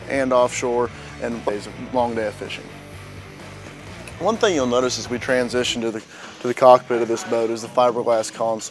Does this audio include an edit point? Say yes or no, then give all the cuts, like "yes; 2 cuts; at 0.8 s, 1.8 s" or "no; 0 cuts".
no; 0 cuts